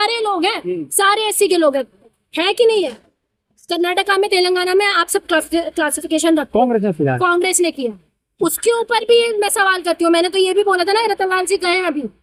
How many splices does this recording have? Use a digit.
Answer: 0